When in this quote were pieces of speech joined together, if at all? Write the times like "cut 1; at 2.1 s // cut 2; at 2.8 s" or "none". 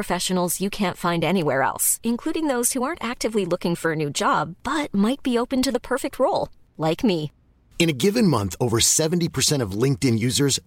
none